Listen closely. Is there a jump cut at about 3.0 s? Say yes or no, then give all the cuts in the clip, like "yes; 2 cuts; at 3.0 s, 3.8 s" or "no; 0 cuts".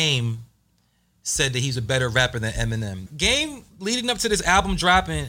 yes; 1 cut; at 3.0 s